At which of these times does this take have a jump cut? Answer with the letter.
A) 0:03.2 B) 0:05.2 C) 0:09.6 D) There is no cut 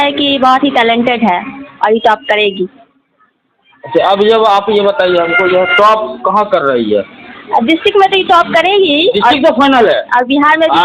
D